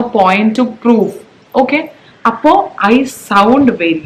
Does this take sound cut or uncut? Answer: uncut